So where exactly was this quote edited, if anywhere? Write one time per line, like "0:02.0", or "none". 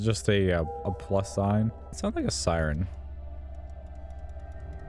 0:01.9